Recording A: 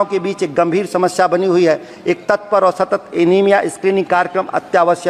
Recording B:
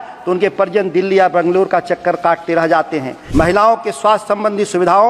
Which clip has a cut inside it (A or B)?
B